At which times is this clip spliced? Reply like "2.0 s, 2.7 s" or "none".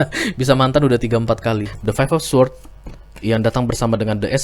1.7 s